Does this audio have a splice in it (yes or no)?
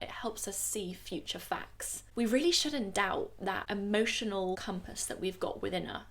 yes